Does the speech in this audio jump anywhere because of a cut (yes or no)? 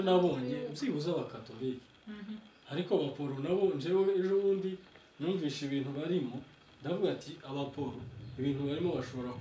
no